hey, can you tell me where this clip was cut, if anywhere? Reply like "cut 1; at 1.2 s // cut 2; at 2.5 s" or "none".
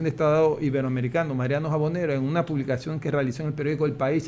none